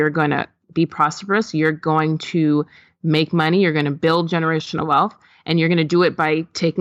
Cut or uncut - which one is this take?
uncut